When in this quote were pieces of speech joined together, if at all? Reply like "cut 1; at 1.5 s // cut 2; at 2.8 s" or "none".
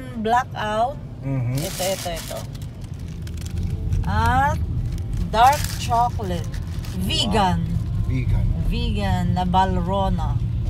none